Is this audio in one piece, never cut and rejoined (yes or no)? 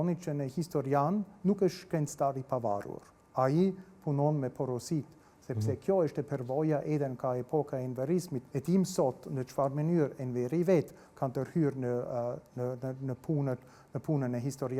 no